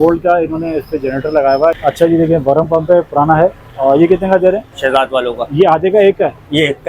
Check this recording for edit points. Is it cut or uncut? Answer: cut